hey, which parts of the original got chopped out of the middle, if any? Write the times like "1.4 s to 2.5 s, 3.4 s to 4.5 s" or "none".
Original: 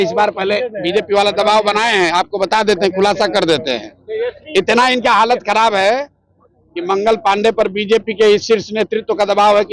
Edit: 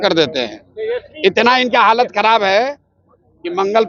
none